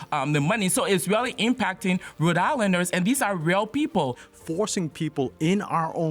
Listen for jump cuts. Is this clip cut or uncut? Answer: cut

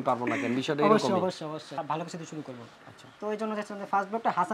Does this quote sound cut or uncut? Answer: cut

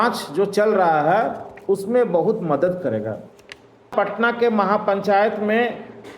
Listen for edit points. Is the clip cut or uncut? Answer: cut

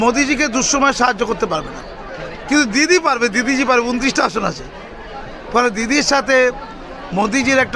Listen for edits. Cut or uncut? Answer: uncut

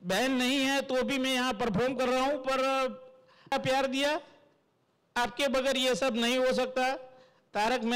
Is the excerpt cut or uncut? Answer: cut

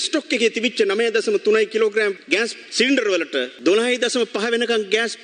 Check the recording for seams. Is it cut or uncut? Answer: uncut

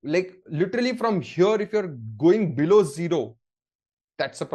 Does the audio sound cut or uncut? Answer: uncut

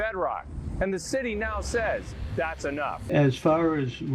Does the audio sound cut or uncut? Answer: cut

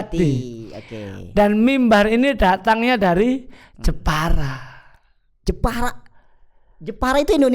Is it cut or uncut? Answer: uncut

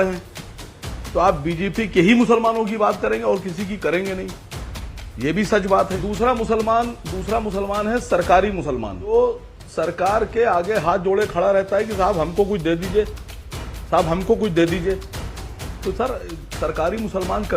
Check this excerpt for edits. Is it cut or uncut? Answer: cut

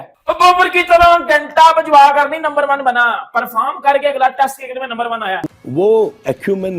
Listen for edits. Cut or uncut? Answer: cut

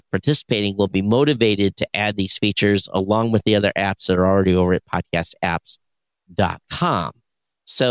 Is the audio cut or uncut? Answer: uncut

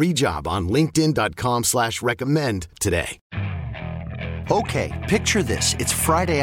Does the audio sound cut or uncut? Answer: cut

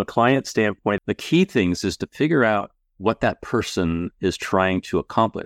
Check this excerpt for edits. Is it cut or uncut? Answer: cut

